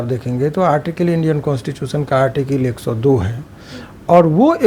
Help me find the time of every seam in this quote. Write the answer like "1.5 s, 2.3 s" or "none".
none